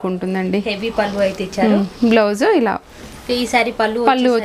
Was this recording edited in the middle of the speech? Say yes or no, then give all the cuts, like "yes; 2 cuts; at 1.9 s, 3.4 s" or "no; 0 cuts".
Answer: yes; 1 cut; at 2.9 s